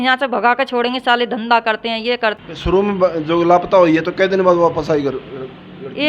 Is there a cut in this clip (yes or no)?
yes